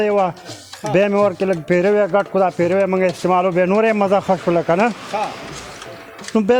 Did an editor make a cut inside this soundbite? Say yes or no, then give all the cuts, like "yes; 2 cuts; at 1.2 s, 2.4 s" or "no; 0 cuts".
no; 0 cuts